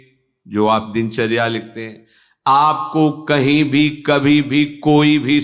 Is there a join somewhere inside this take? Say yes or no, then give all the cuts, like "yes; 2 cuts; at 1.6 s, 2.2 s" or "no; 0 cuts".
no; 0 cuts